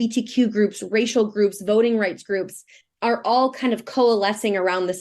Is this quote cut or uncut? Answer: uncut